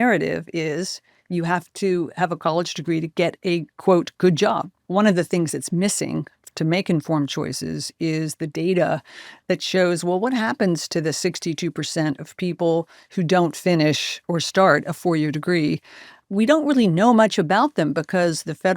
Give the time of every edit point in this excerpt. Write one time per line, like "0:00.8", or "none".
0:04.7
0:14.1
0:16.2